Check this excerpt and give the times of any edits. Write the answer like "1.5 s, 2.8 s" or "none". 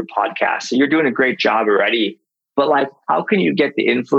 none